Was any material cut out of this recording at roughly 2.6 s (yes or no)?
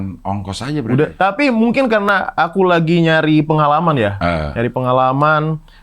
no